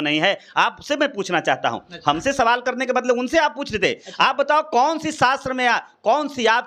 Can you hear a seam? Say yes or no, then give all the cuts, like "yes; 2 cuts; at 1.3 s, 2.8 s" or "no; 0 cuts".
no; 0 cuts